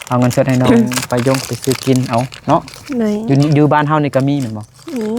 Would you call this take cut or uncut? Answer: uncut